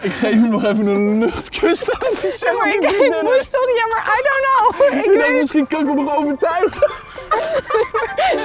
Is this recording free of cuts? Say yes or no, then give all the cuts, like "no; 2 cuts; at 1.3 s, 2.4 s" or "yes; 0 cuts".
yes; 0 cuts